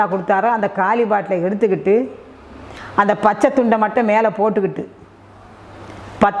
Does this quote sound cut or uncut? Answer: uncut